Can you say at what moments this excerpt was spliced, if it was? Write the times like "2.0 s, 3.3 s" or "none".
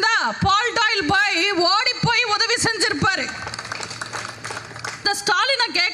5.1 s